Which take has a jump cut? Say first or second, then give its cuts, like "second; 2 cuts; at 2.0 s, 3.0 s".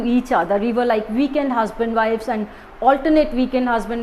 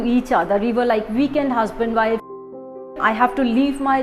second; 1 cut; at 2.9 s